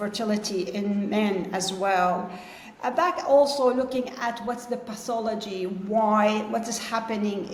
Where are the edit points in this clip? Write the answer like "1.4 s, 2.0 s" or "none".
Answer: none